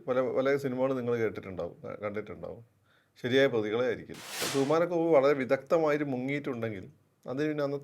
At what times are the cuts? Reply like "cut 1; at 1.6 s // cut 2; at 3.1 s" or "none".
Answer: cut 1; at 4.5 s